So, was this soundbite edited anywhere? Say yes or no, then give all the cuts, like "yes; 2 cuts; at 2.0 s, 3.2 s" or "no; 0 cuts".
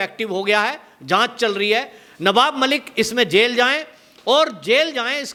no; 0 cuts